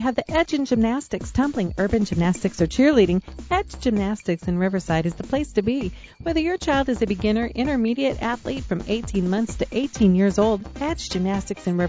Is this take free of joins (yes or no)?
yes